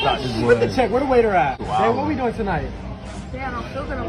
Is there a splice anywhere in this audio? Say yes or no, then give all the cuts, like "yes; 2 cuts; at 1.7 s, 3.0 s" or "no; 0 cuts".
yes; 1 cut; at 1.6 s